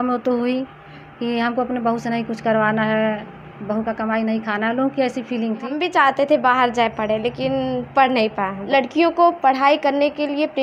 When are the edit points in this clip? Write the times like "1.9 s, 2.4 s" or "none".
5.8 s, 8.6 s

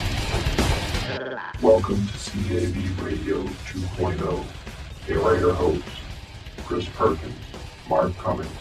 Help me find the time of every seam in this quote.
1.5 s

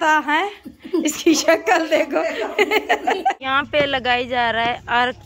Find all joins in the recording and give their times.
3.4 s

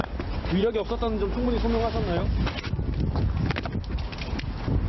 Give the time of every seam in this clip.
none

